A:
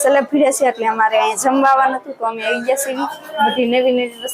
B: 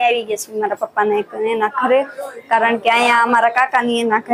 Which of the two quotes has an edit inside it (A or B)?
A